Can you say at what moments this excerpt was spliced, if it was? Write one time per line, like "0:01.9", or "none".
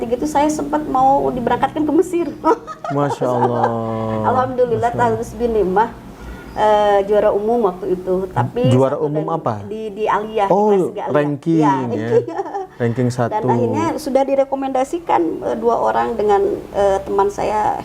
none